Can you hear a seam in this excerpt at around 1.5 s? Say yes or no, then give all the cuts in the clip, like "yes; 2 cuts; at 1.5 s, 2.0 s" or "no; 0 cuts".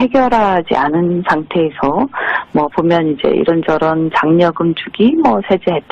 no; 1 cut; at 4.9 s